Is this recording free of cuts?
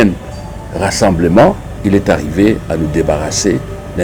no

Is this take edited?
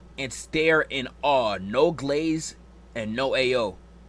no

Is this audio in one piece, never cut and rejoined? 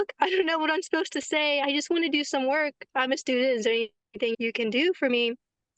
no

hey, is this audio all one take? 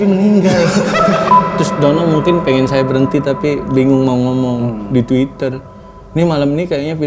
no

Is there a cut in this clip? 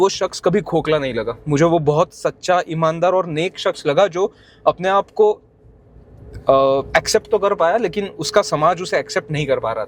no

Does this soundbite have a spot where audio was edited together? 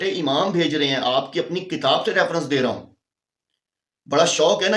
no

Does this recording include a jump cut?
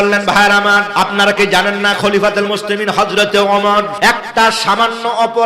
yes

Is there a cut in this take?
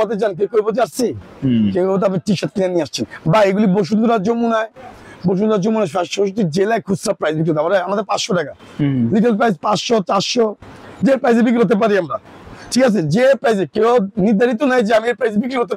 no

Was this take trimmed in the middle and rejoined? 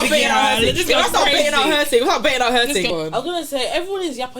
yes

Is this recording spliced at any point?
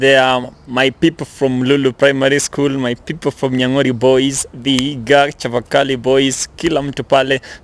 no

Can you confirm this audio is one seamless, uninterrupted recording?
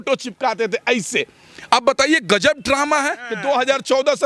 no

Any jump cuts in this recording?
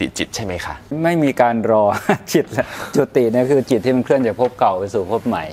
yes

